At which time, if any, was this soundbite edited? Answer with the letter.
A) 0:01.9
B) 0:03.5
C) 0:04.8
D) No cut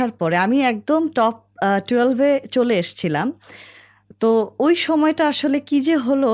D